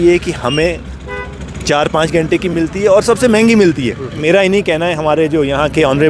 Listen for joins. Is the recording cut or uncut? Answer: cut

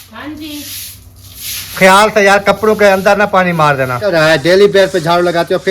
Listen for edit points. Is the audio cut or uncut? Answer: cut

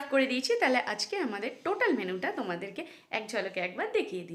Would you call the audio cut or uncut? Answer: uncut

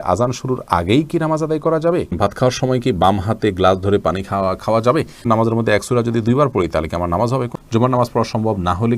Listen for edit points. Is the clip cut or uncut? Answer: cut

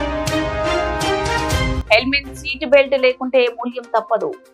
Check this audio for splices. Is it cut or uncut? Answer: uncut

